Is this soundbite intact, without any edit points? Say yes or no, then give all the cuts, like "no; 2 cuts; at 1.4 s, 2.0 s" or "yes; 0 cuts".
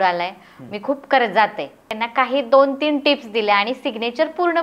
no; 1 cut; at 1.8 s